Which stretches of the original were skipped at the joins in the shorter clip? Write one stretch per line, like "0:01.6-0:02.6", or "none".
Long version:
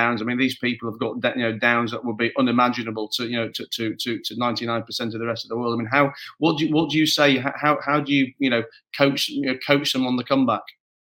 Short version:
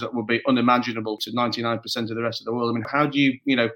0:03.1-0:04.3
0:05.9-0:07.8